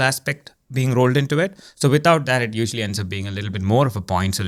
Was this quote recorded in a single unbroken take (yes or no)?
yes